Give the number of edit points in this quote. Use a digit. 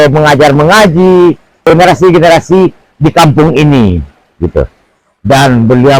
1